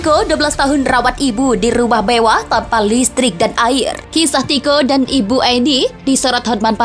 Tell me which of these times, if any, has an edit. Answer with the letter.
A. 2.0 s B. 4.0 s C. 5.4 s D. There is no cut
B